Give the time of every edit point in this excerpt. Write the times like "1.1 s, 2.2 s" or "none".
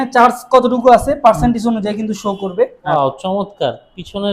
2.9 s